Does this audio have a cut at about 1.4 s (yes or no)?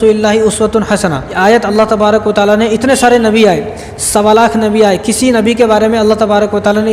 yes